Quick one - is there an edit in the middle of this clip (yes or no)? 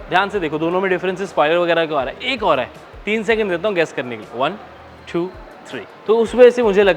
yes